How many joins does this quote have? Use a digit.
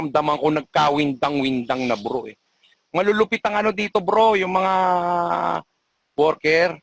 0